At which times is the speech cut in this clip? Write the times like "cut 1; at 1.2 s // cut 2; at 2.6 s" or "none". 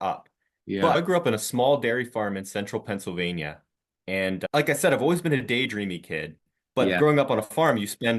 cut 1; at 0.9 s